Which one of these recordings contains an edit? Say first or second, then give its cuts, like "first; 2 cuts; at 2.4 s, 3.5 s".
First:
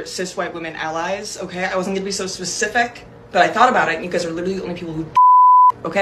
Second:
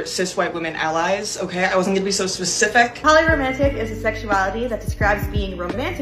second; 1 cut; at 3.0 s